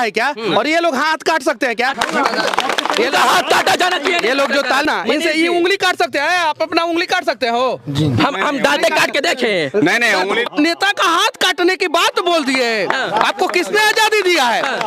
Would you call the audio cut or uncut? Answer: cut